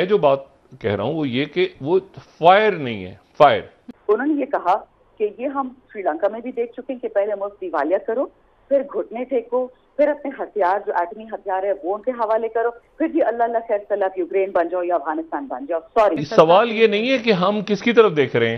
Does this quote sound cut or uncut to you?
cut